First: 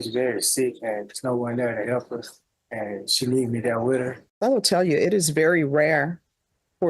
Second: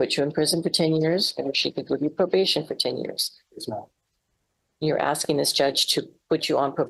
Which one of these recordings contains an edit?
first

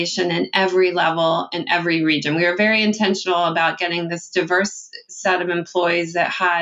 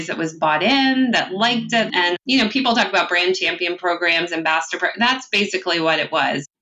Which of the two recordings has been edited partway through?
second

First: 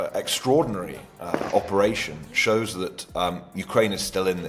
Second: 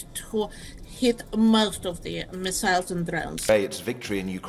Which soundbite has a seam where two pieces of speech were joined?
second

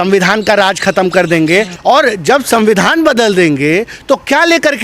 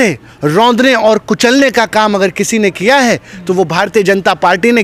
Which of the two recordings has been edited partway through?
first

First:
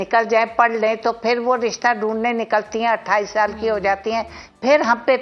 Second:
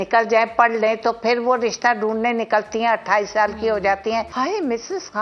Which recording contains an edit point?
second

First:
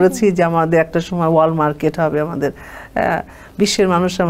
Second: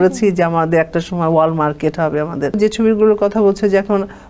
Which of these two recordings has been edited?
second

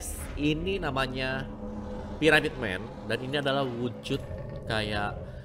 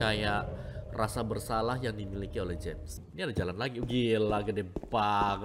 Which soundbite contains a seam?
second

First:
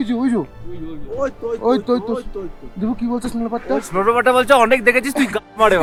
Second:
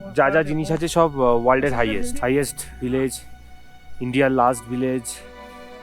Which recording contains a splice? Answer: second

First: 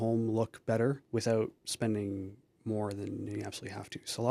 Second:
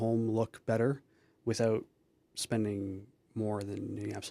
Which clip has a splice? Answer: first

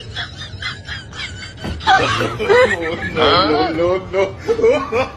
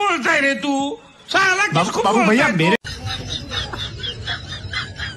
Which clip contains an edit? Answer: second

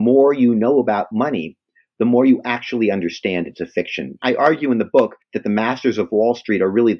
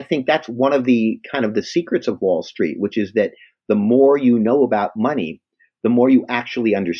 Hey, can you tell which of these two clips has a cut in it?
first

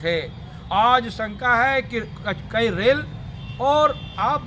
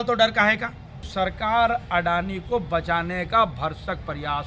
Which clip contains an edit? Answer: second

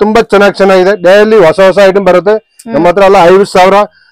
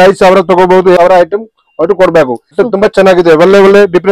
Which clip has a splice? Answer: second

